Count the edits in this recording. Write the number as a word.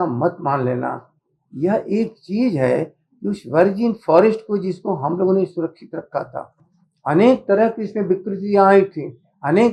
zero